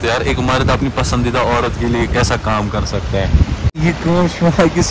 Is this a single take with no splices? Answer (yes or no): no